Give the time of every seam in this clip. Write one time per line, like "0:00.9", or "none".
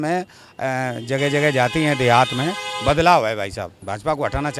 0:03.7